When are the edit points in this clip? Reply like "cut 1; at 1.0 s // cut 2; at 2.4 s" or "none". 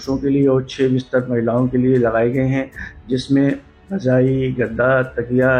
none